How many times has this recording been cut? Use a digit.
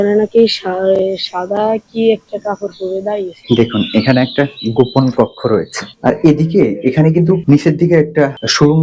2